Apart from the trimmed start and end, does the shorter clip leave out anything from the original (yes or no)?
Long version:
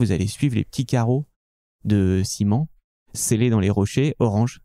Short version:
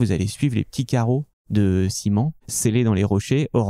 yes